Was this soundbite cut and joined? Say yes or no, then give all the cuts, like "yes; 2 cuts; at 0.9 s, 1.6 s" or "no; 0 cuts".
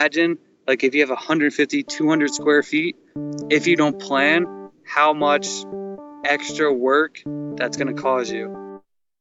yes; 1 cut; at 8.3 s